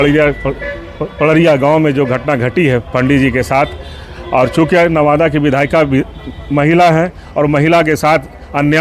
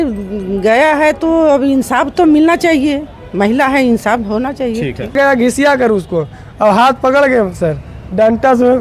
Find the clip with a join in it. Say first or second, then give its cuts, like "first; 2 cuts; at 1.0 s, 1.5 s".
second; 1 cut; at 5.2 s